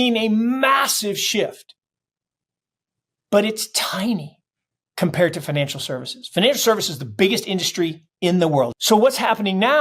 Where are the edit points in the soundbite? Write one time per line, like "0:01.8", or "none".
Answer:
0:08.8